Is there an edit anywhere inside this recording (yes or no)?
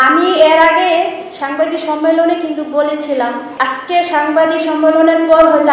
yes